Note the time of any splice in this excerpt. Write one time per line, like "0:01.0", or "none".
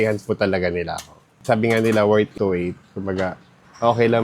0:02.7